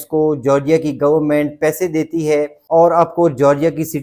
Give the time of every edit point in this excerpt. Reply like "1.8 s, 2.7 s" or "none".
2.3 s